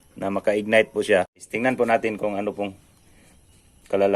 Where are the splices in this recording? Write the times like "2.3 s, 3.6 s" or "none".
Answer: 1.5 s